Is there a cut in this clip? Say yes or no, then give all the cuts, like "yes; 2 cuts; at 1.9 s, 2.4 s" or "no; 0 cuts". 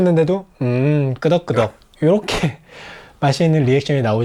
no; 0 cuts